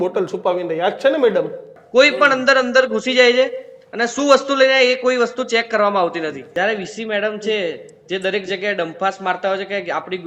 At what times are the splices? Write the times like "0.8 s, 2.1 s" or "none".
1.7 s, 6.5 s